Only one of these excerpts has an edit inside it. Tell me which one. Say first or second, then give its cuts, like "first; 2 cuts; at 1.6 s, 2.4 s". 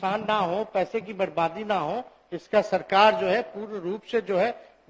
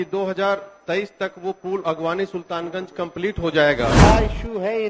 second; 1 cut; at 4.0 s